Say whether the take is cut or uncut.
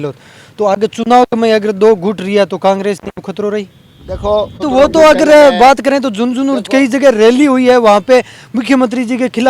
cut